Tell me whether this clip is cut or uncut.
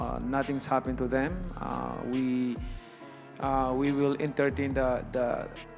uncut